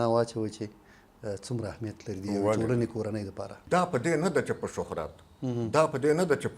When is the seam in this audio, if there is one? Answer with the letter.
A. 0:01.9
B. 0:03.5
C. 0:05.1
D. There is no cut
B